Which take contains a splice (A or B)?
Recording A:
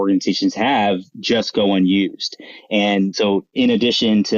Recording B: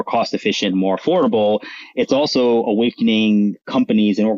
A